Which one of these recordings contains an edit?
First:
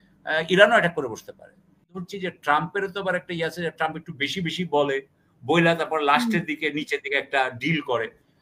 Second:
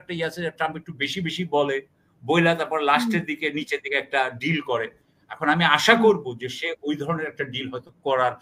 first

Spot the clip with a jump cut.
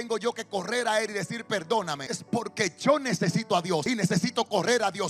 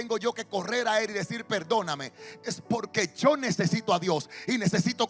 first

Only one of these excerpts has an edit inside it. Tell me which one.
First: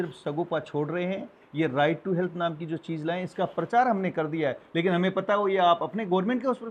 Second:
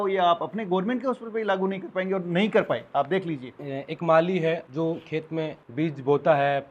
second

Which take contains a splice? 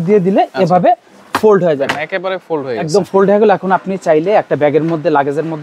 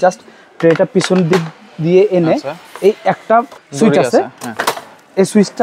second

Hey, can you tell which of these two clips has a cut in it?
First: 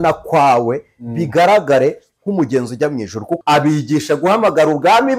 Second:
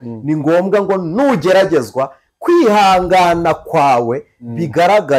first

